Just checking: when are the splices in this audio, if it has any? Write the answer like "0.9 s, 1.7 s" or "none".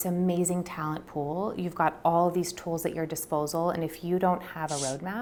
none